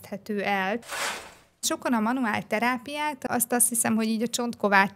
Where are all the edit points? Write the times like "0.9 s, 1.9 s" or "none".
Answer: 1.4 s